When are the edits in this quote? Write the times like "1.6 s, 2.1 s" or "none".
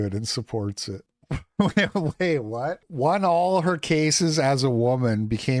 1.2 s